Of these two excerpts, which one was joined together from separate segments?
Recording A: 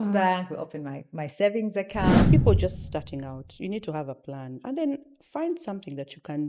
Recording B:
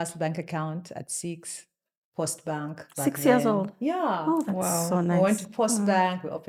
A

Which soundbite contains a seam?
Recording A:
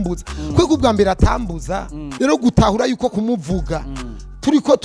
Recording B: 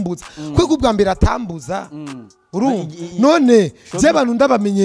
A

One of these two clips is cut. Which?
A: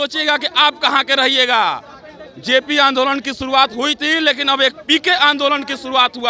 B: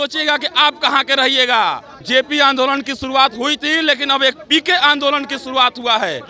B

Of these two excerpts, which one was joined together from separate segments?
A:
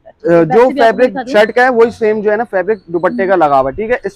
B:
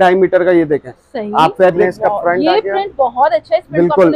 B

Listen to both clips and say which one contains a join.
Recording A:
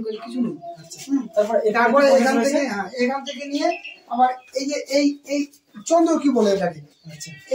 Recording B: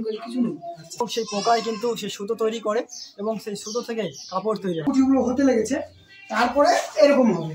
B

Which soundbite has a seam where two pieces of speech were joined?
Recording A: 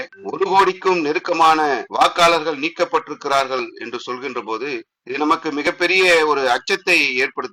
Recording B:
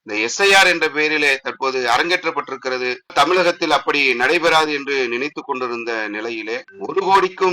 B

